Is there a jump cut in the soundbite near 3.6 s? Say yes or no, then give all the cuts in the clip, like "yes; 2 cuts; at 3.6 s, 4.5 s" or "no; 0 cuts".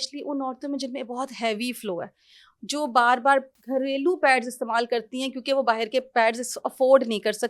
yes; 1 cut; at 3.6 s